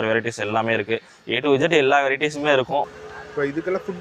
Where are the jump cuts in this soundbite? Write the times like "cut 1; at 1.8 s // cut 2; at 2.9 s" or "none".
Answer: cut 1; at 2.9 s